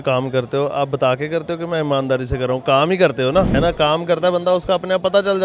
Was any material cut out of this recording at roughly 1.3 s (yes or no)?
no